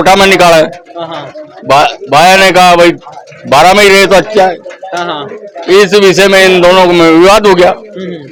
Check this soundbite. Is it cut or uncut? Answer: uncut